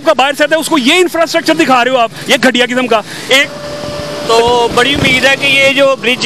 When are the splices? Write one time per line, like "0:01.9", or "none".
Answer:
0:03.5